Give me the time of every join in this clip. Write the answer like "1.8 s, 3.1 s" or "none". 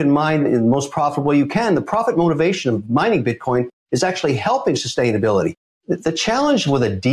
5.7 s